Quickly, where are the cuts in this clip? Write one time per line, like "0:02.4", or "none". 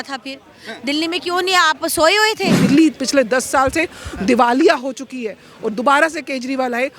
0:02.6